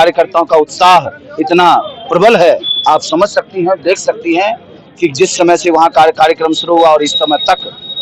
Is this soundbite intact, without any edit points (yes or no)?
yes